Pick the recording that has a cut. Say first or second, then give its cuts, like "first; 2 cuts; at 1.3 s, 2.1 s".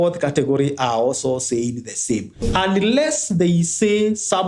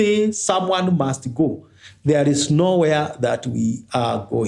first; 1 cut; at 2.4 s